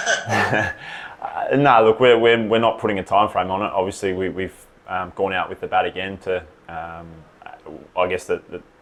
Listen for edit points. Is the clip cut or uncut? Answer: uncut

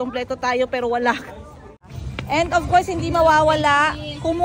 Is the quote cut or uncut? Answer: cut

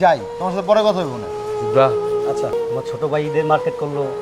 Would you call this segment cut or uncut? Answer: cut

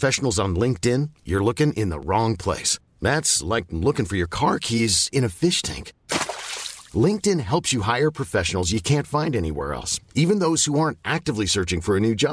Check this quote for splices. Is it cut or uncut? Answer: uncut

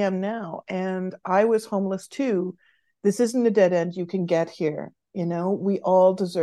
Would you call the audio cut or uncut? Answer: uncut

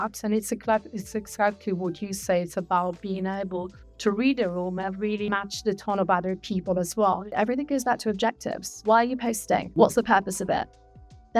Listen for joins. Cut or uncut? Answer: cut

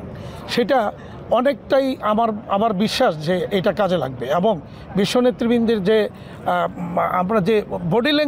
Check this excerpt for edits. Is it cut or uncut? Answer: uncut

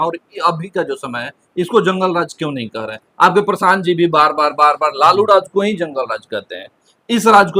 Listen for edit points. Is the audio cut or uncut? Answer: uncut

